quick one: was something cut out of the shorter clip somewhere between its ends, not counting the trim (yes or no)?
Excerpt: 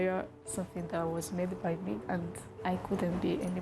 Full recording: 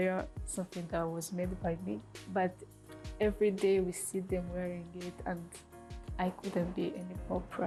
yes